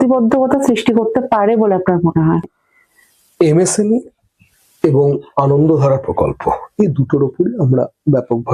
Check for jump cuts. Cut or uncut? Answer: cut